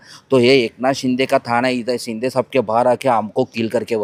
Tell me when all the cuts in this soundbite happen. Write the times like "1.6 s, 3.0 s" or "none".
none

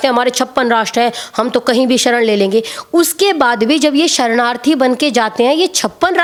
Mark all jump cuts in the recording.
none

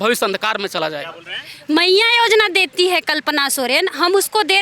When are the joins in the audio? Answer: none

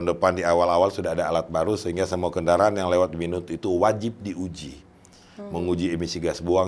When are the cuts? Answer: none

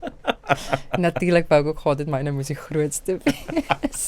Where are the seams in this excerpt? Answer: none

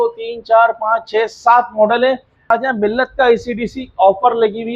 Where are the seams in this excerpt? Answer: 2.5 s

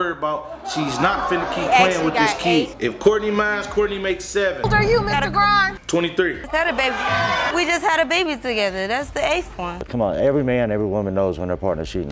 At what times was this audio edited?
9.8 s

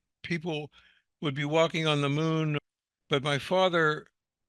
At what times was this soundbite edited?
2.7 s

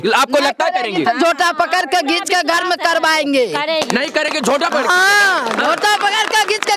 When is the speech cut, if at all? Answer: none

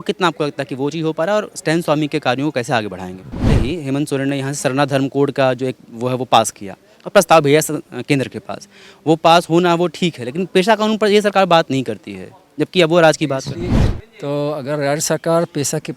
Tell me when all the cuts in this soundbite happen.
3.5 s, 13.8 s

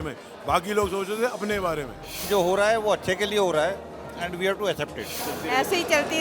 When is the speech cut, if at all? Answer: 2.2 s, 5.2 s

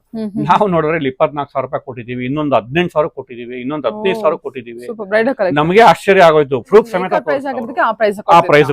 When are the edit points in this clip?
7.5 s

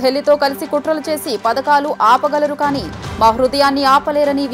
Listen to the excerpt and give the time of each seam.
none

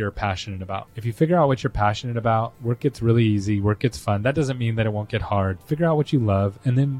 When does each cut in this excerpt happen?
1.0 s, 2.6 s, 5.6 s

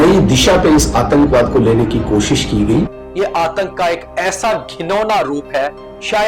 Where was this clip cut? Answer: 3.0 s

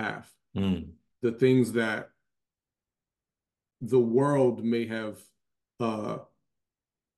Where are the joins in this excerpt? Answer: 1.0 s

